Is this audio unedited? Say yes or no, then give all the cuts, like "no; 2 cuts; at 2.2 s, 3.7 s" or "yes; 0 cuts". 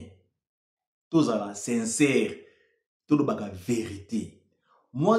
yes; 0 cuts